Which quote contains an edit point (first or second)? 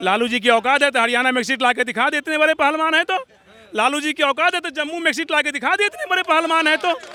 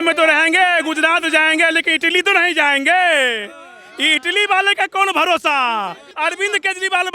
second